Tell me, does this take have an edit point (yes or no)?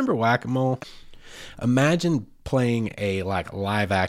yes